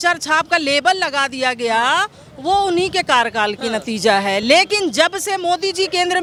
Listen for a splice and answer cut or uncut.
uncut